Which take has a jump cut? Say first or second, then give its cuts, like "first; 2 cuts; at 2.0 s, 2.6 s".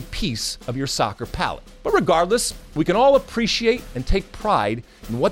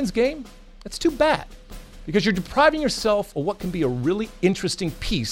first; 2 cuts; at 1.7 s, 3.9 s